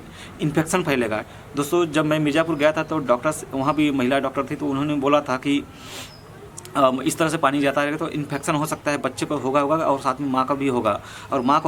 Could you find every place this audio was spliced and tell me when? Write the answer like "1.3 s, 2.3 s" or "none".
none